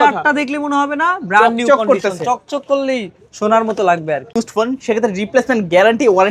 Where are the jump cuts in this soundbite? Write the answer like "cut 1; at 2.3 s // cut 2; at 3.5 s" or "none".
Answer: cut 1; at 4.3 s